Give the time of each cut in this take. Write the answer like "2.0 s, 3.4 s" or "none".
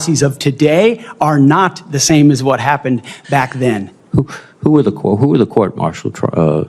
3.9 s